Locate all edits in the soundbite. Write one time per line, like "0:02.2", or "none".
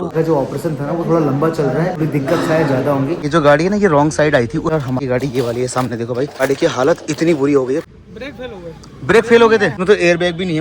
0:01.9
0:03.2
0:04.8
0:06.4
0:07.9
0:09.8

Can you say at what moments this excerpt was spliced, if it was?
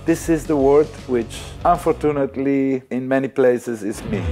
0:01.4
0:02.9

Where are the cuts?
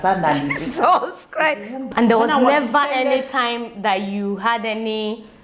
0:01.8

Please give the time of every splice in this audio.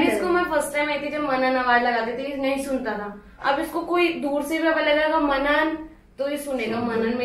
none

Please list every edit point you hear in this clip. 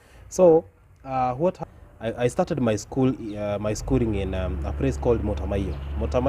0:01.6

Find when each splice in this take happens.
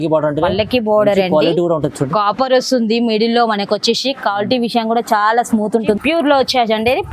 0:06.0

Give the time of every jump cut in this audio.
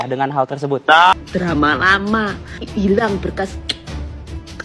0:01.2

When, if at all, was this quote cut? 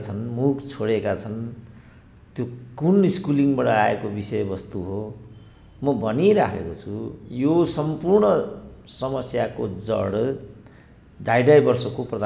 none

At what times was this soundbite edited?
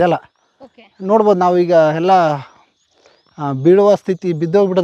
none

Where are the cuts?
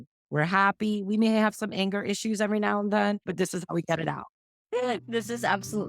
0:04.3

